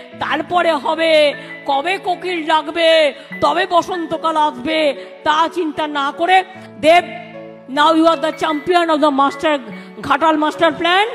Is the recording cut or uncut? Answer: cut